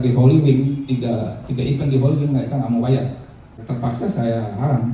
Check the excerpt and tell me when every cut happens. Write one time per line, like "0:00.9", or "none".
0:03.6